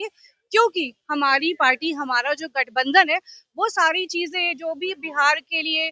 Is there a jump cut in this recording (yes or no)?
no